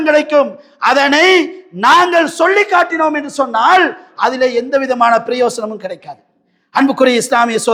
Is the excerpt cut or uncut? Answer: uncut